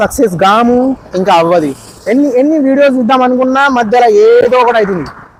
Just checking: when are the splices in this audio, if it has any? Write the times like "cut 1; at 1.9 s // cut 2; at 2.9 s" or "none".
none